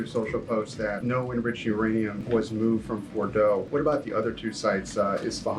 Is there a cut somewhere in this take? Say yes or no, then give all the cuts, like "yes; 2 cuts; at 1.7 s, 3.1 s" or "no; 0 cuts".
yes; 3 cuts; at 1.0 s, 2.2 s, 3.7 s